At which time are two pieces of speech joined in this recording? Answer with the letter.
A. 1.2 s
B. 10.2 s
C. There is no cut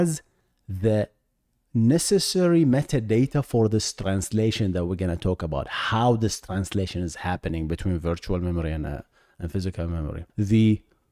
B